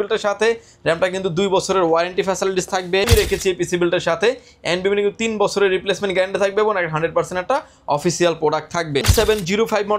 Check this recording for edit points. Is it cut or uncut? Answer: cut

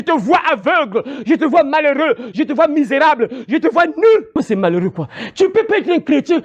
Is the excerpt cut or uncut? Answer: cut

